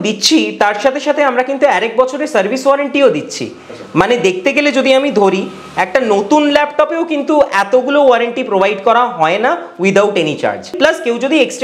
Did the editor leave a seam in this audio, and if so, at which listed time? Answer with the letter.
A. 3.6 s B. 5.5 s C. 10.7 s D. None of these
C